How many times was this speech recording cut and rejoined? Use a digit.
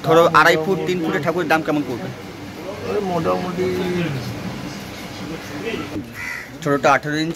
1